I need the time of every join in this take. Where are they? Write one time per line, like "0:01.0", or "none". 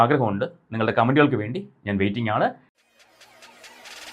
0:02.7